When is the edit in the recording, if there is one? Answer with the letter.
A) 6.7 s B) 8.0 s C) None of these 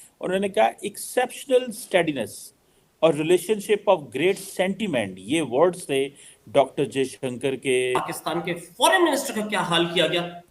B